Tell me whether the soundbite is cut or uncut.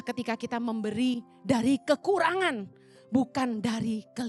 uncut